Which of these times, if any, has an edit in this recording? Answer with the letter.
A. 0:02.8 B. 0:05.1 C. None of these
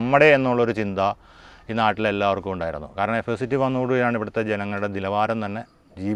C